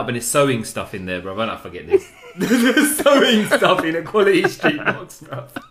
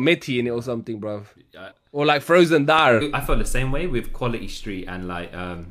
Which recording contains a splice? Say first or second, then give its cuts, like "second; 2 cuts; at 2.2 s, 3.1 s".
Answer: second; 2 cuts; at 1.7 s, 3.1 s